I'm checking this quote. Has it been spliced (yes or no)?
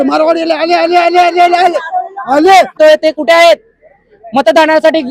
yes